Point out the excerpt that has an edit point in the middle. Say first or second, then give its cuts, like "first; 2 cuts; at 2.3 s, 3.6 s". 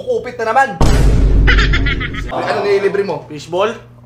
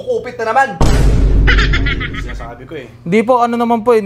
first; 1 cut; at 2.3 s